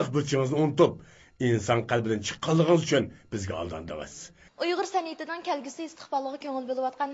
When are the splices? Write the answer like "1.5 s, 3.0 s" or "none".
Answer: 2.6 s